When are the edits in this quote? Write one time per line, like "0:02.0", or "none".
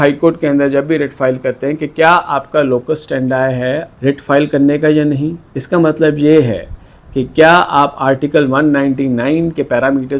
none